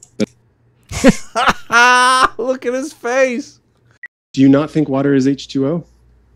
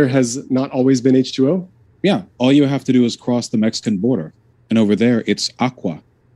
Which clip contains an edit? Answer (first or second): first